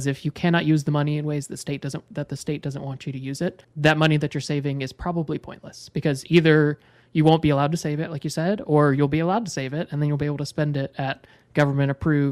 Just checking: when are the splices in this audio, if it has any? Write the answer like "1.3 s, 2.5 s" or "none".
3.7 s